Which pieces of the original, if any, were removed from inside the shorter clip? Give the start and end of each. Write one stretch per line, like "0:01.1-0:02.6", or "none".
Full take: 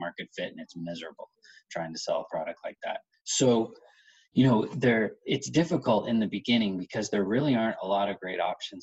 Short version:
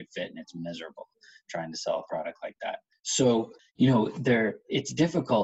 0:03.8-0:04.2